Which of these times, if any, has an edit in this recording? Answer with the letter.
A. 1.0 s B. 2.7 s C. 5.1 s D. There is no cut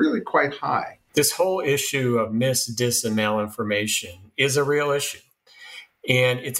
A